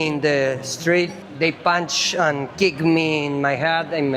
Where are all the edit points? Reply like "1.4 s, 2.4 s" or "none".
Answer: 1.2 s